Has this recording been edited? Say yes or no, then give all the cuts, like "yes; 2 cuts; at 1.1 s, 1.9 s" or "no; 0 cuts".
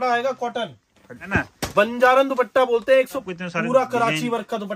yes; 2 cuts; at 1.2 s, 3.2 s